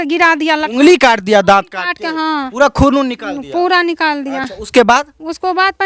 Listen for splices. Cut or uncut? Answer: uncut